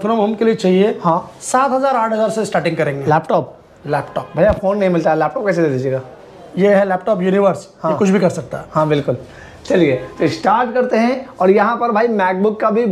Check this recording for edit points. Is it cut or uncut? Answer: uncut